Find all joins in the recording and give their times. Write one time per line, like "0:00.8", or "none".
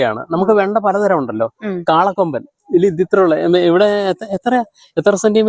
none